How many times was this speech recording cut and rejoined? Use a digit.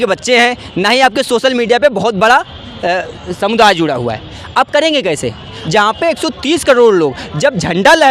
1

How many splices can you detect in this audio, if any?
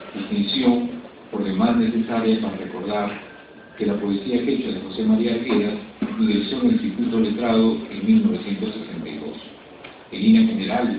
1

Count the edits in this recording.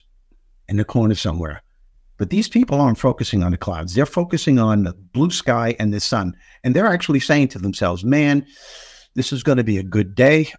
0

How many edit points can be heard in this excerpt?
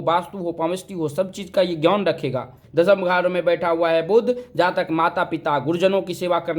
1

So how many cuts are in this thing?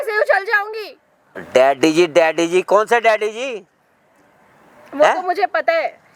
0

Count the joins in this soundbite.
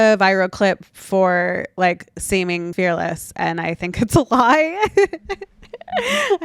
1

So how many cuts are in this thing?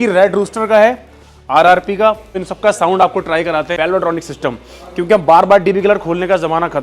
2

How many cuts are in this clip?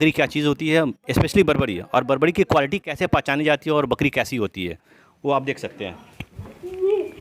0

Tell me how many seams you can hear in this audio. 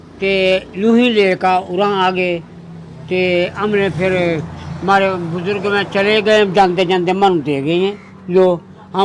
0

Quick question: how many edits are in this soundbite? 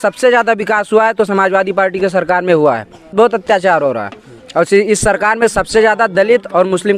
1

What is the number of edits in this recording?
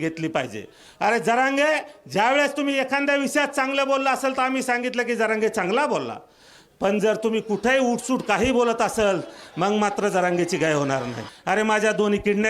1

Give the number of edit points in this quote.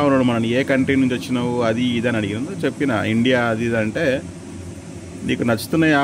0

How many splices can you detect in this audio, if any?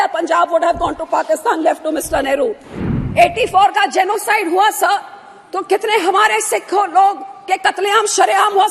1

